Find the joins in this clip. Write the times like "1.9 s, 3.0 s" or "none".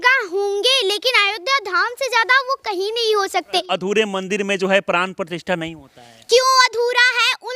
3.7 s